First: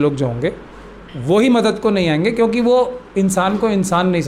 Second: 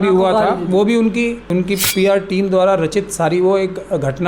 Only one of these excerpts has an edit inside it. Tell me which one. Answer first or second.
second